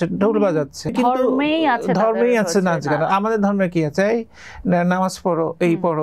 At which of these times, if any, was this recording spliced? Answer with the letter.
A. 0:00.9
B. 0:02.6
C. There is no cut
A